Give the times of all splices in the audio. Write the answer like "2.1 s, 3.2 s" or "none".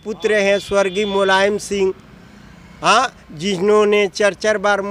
none